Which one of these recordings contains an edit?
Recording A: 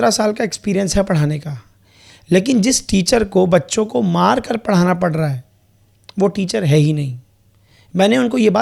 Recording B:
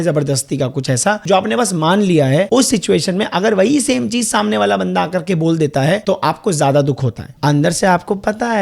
B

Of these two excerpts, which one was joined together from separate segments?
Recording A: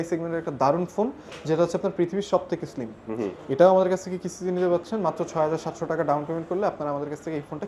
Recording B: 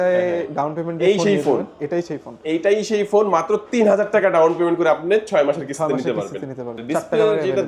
B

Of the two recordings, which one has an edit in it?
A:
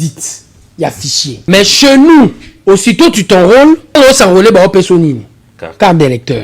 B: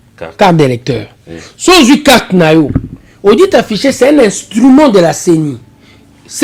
A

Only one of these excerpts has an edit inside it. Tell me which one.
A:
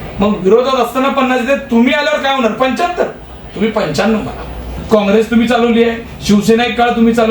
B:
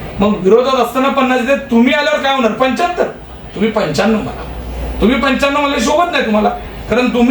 A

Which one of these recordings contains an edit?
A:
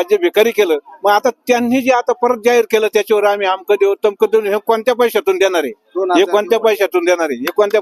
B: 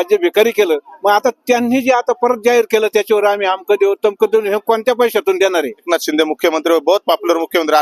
B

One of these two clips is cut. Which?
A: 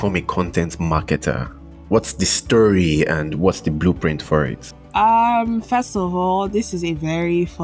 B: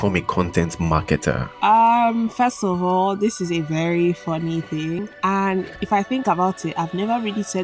B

